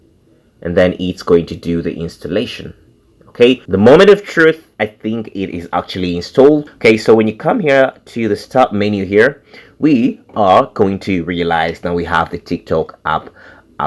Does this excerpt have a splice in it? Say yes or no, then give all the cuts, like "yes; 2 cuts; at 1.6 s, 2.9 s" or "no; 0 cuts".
yes; 2 cuts; at 3.6 s, 6.7 s